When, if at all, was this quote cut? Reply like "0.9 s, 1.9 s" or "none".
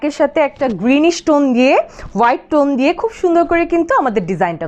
none